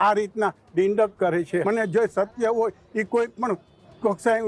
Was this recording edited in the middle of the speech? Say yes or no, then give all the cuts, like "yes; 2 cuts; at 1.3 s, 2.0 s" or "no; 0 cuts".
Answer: yes; 1 cut; at 1.6 s